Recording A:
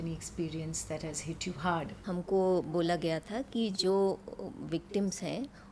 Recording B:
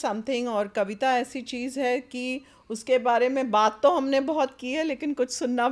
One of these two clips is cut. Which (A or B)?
A